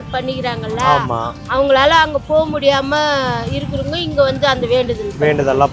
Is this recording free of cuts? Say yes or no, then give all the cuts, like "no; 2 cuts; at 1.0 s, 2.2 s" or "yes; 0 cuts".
yes; 0 cuts